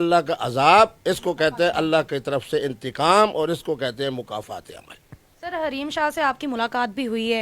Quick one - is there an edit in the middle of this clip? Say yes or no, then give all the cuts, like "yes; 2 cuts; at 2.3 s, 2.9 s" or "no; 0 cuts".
no; 0 cuts